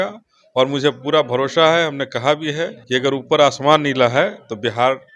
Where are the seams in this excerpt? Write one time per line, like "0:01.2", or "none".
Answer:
0:02.7